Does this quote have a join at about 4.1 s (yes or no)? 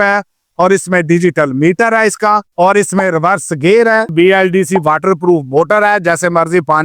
yes